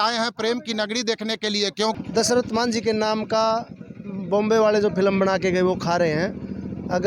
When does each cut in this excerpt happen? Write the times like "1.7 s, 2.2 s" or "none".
2.0 s